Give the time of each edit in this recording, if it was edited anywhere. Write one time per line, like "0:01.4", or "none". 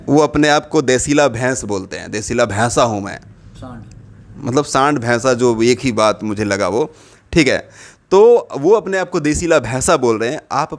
none